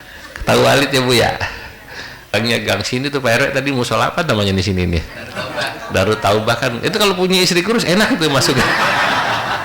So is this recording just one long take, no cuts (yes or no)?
no